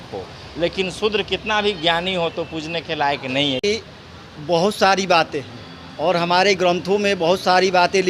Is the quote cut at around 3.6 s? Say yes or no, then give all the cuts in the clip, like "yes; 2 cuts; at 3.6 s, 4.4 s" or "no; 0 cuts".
yes; 1 cut; at 3.6 s